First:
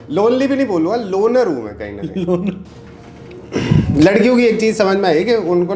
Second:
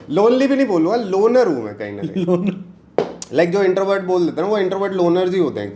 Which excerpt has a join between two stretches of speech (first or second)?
first